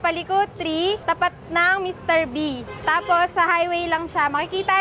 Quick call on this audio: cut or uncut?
uncut